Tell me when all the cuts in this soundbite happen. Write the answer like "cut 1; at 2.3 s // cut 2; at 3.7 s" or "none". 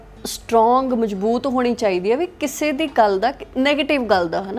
none